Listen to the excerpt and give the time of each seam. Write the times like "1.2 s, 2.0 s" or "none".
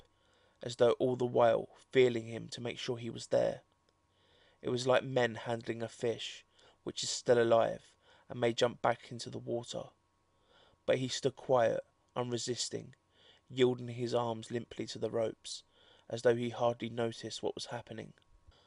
3.0 s